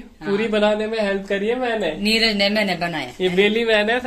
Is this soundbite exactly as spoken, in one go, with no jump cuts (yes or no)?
yes